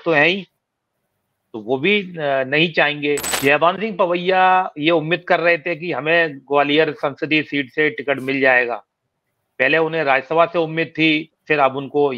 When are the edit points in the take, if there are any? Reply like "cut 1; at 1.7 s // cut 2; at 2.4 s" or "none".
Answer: cut 1; at 3.3 s